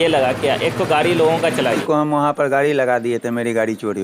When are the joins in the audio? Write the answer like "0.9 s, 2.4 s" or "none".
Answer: 1.8 s